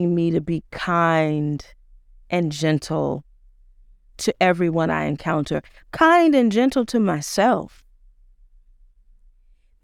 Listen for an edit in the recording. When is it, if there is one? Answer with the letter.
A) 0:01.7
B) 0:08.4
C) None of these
C